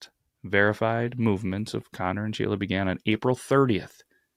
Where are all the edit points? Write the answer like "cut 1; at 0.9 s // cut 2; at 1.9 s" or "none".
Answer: none

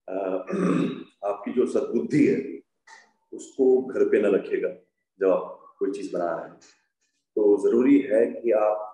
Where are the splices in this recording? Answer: none

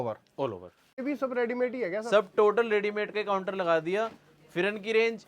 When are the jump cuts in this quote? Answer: cut 1; at 1.0 s

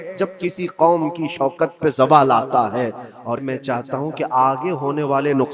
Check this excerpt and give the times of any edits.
cut 1; at 3.4 s

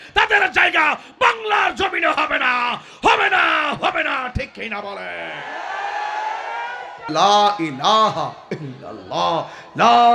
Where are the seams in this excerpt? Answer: cut 1; at 7.1 s

